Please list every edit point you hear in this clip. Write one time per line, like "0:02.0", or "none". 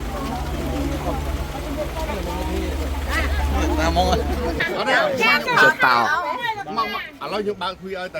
0:04.6